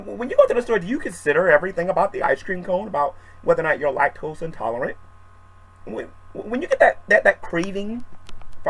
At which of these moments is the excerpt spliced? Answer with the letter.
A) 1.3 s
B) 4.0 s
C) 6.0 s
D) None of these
B